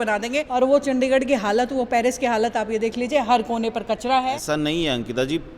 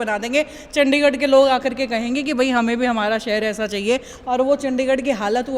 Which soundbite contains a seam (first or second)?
first